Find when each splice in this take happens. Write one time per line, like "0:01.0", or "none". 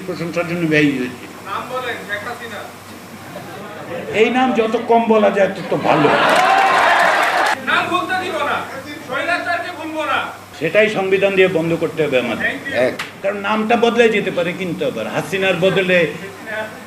0:01.4
0:07.6
0:10.4
0:13.1